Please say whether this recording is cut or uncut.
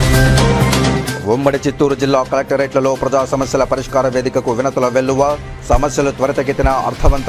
uncut